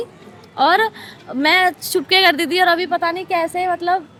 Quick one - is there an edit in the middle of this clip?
no; 0 cuts

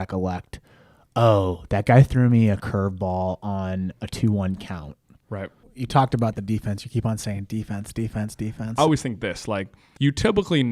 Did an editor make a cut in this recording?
yes; 3 cuts; at 5.6 s, 8.6 s, 9.8 s

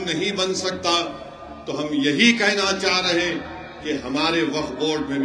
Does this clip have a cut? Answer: no; 0 cuts

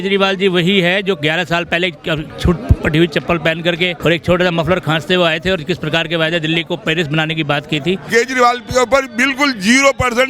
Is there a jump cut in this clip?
yes; 2 cuts; at 3.9 s, 8.1 s

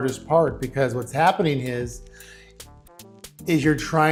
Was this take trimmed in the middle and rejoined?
no; 0 cuts

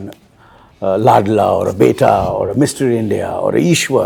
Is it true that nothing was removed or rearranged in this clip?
yes; 0 cuts

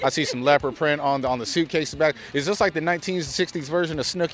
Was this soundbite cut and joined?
no; 0 cuts

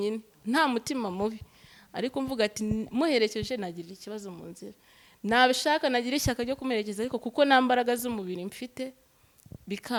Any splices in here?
no; 0 cuts

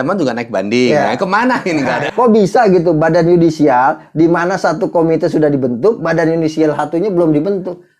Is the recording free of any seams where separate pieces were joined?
no; 1 cut; at 2.0 s

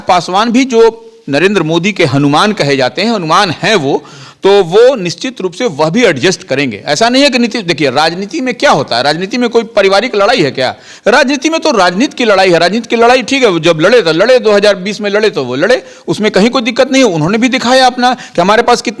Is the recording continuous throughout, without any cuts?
yes; 0 cuts

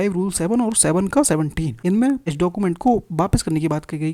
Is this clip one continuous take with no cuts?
no; 2 cuts; at 1.7 s, 2.3 s

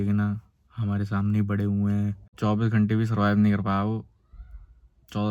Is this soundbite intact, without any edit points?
no; 1 cut; at 2.4 s

